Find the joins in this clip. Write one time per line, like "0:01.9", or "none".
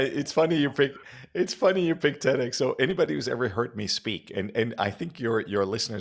none